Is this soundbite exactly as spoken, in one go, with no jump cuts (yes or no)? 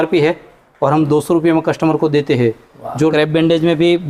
no